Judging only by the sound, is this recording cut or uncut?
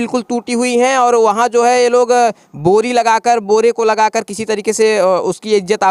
uncut